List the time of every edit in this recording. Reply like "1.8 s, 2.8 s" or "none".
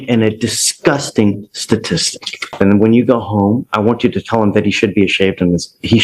2.5 s